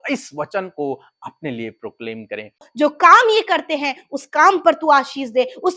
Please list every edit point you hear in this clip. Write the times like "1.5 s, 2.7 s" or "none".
2.7 s